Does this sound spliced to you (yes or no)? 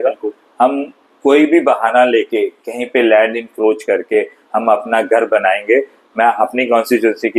no